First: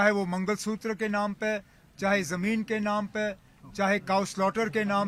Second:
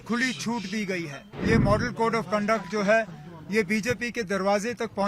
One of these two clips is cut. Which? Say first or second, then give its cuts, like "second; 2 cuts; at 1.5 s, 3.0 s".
second; 1 cut; at 1.3 s